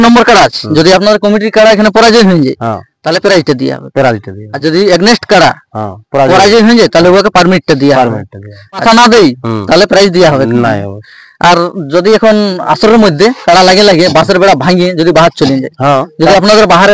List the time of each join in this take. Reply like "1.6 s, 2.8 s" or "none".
8.8 s